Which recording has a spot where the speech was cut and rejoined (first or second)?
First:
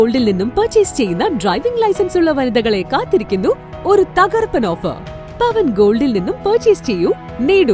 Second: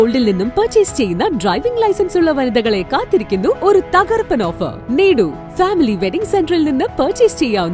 second